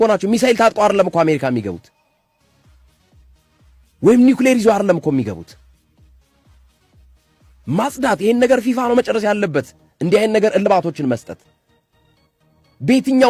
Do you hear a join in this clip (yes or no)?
no